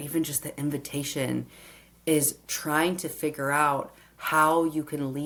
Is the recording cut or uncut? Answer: uncut